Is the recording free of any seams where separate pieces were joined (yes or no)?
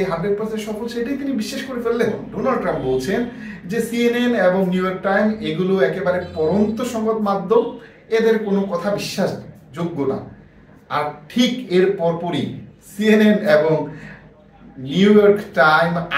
no